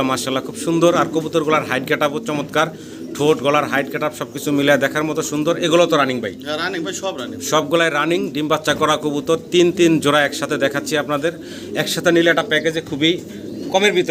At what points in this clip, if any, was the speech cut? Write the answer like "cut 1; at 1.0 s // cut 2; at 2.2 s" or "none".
none